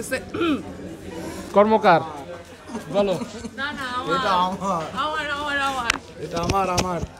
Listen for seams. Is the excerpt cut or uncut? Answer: cut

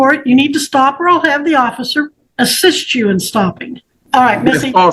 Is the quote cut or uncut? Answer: cut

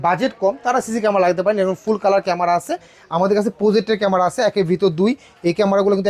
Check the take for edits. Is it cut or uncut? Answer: cut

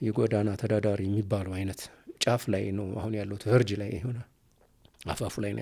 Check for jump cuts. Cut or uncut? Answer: uncut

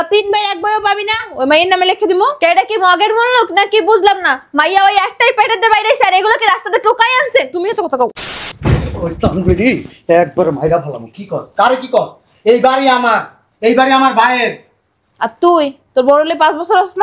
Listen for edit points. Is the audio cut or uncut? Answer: cut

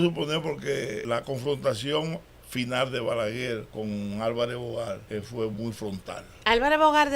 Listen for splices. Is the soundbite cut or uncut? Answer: cut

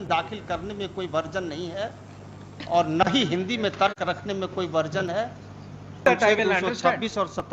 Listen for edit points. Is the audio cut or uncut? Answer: cut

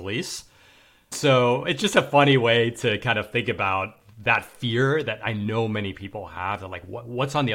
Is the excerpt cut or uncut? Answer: cut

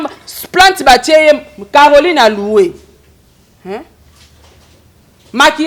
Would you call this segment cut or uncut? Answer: uncut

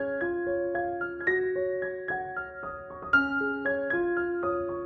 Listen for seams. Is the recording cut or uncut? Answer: uncut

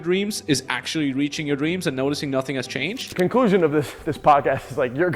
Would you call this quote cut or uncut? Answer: cut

